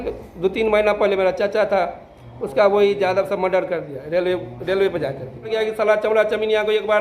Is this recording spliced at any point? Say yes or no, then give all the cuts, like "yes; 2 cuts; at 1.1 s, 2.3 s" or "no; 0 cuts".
yes; 1 cut; at 5.5 s